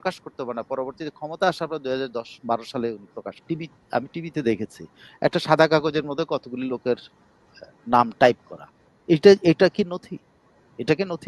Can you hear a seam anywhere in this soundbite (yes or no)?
yes